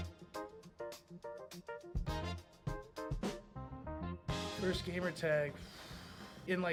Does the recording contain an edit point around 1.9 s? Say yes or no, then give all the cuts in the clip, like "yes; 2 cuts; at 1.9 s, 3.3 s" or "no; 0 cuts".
no; 0 cuts